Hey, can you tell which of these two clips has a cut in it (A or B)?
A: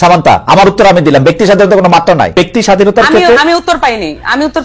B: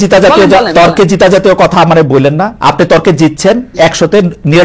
A